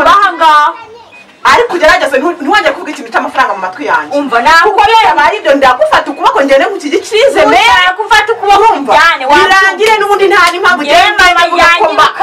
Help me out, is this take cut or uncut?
uncut